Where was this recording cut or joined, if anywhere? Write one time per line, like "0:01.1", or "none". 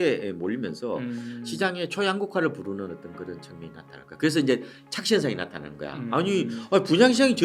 none

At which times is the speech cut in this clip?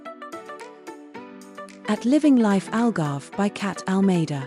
0:01.9

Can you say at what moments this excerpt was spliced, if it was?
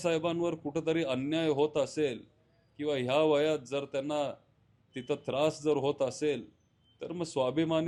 none

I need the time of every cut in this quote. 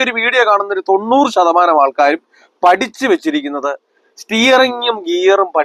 none

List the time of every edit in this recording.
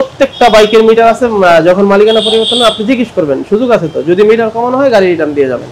none

